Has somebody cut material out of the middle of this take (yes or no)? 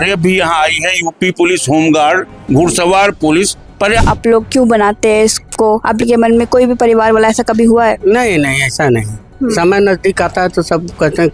yes